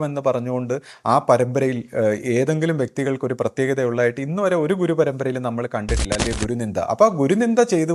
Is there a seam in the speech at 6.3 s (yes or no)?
yes